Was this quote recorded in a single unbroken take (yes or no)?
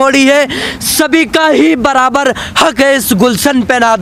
yes